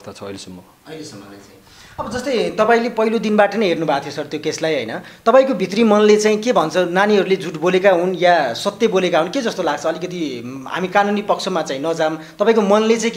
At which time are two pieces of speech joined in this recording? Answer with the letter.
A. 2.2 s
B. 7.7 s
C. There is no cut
C